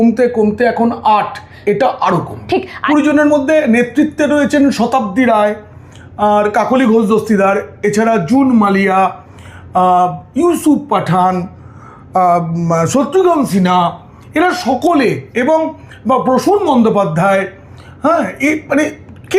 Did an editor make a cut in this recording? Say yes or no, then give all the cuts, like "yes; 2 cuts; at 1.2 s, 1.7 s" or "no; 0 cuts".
yes; 1 cut; at 2.7 s